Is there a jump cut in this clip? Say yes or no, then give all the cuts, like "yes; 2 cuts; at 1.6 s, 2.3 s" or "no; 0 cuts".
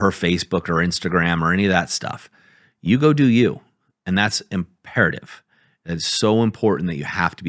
no; 0 cuts